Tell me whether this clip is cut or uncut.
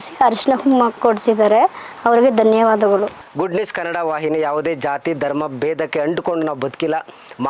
cut